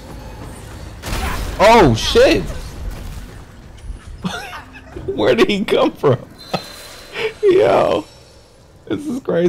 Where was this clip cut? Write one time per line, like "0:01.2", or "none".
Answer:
none